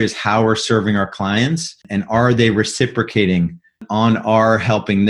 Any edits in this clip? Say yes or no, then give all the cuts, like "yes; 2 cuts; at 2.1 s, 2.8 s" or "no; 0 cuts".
yes; 1 cut; at 1.7 s